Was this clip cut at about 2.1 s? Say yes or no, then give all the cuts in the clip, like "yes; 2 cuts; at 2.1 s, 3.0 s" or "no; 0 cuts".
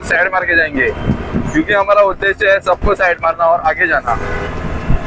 no; 0 cuts